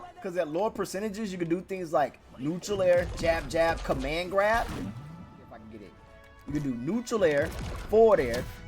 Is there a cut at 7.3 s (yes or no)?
no